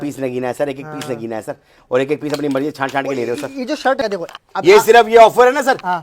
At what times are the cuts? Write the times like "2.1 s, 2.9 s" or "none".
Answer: 4.0 s